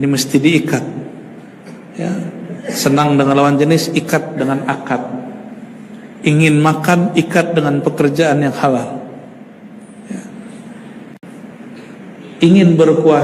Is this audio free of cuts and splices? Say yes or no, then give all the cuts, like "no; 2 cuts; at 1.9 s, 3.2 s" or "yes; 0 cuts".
yes; 0 cuts